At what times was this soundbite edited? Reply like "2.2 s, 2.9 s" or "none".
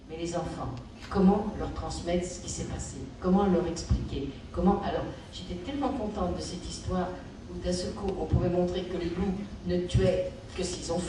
none